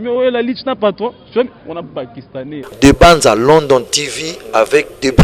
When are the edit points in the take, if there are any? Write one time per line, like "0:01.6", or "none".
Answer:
0:02.7

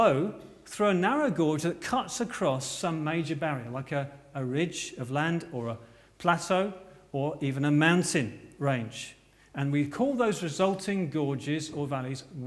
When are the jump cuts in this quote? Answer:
0:03.6

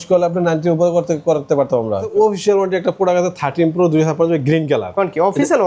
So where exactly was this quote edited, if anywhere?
0:02.1

